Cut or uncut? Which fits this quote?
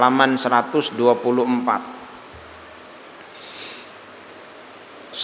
uncut